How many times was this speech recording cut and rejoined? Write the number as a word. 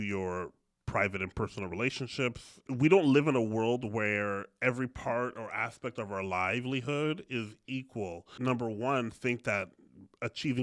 two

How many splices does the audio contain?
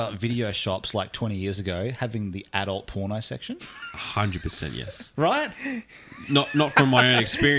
zero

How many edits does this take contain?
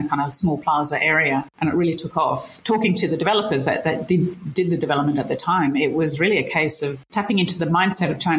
three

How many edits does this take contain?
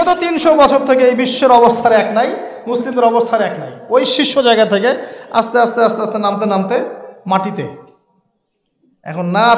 zero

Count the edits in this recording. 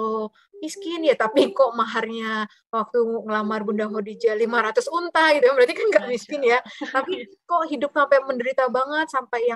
zero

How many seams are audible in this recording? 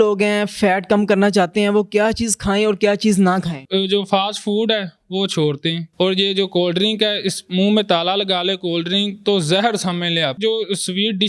three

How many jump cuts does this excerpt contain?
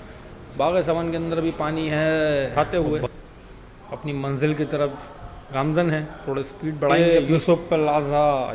two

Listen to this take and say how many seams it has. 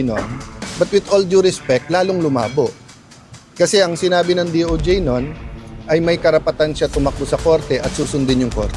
zero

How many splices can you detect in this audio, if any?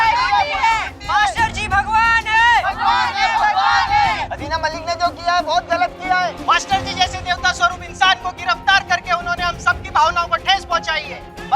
zero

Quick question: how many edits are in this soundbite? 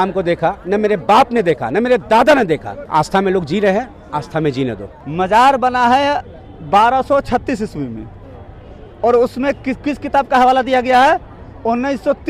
two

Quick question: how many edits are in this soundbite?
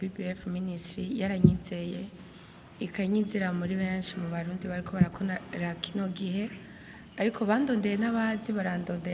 zero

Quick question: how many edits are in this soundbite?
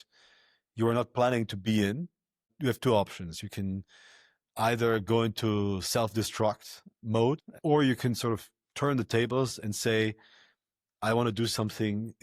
two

